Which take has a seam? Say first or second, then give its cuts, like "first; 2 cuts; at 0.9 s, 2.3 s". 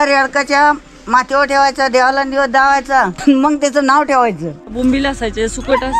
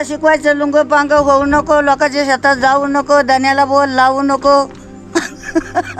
first; 2 cuts; at 3.2 s, 4.7 s